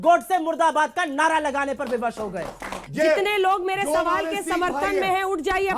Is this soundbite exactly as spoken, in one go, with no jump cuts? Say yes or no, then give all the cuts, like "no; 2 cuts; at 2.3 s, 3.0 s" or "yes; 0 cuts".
no; 1 cut; at 2.8 s